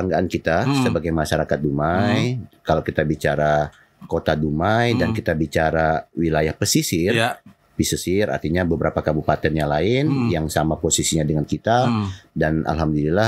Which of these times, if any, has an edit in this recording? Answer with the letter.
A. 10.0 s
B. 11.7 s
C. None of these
C